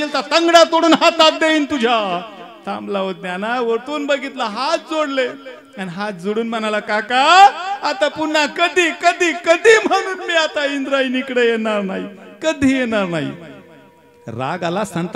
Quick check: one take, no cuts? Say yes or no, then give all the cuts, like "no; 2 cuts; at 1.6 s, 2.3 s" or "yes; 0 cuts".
yes; 0 cuts